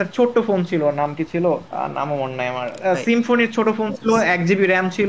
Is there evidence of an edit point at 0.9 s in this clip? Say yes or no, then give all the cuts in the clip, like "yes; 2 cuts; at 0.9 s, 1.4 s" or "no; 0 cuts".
no; 0 cuts